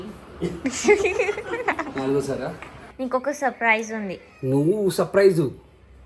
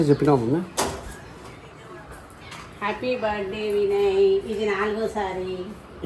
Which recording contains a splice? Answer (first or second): first